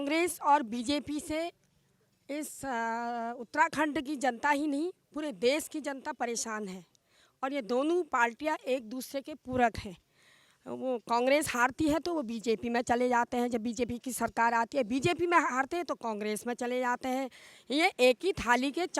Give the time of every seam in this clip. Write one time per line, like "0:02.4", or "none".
none